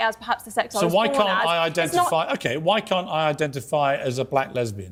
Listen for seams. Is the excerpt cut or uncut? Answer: uncut